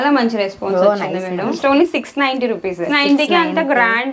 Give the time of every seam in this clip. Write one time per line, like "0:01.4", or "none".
0:01.5
0:02.9